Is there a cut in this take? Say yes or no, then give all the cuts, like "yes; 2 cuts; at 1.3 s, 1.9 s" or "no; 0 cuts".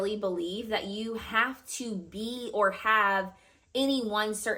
no; 0 cuts